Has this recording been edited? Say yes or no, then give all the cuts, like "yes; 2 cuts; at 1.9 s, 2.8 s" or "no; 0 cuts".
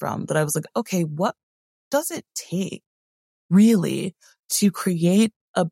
no; 0 cuts